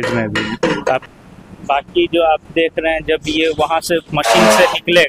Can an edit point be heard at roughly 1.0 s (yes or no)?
yes